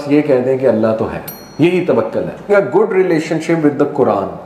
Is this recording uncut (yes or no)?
no